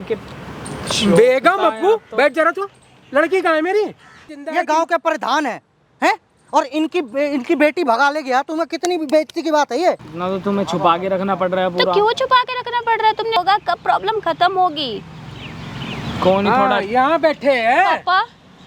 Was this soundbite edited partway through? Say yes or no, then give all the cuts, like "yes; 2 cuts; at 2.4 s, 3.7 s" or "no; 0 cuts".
yes; 3 cuts; at 4.4 s, 10.1 s, 13.4 s